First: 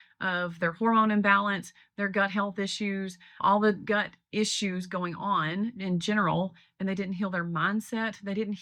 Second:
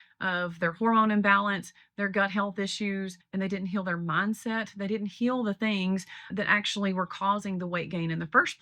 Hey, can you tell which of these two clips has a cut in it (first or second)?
second